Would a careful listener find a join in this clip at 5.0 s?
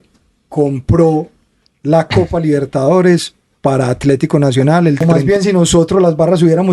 yes; 1 cut; at 5.0 s

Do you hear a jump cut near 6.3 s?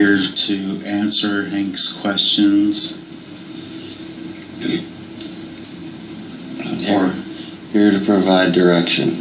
no; 0 cuts

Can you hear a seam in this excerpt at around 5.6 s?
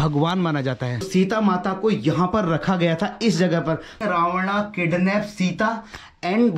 no; 2 cuts; at 1.1 s, 4.0 s

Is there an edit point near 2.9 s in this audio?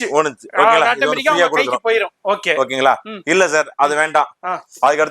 no; 0 cuts

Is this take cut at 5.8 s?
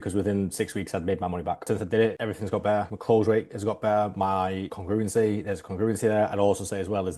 no; 1 cut; at 1.7 s

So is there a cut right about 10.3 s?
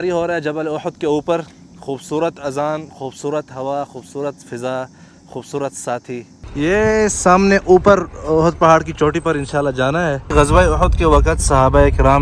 yes; 2 cuts; at 6.4 s, 10.3 s

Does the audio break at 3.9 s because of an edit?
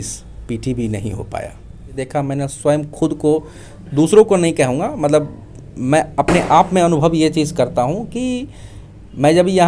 no; 1 cut; at 2.0 s

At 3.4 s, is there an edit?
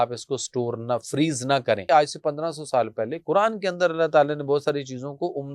no; 1 cut; at 1.8 s

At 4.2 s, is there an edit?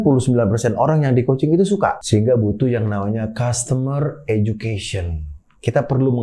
no; 1 cut; at 2.0 s

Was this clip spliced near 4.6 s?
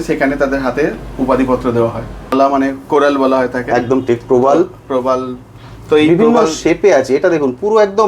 no; 1 cut; at 2.3 s

